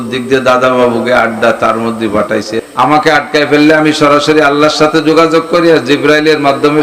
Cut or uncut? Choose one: cut